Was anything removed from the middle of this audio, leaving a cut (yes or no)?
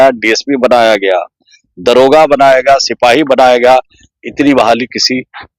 no